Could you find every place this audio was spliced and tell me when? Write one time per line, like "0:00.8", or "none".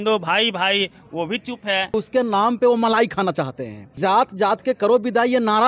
0:01.9
0:04.0